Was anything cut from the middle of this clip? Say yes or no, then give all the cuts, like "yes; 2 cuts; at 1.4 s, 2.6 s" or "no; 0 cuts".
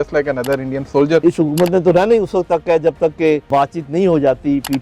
yes; 2 cuts; at 1.2 s, 3.5 s